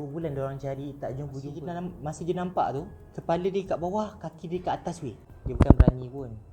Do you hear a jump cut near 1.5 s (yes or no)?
yes